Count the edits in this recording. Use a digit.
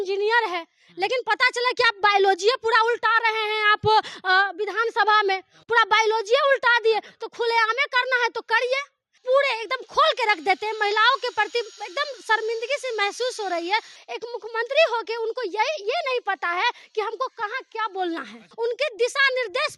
3